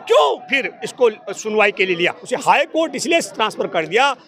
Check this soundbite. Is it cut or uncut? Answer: cut